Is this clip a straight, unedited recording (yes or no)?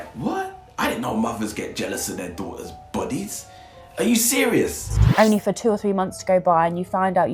no